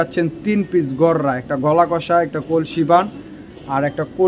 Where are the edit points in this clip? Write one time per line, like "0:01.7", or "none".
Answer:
none